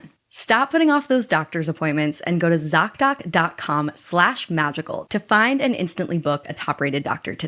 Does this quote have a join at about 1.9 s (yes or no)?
no